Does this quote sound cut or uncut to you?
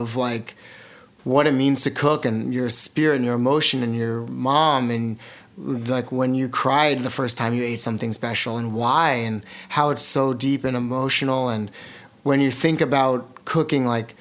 uncut